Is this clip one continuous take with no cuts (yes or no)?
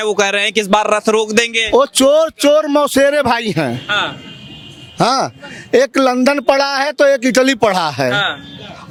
yes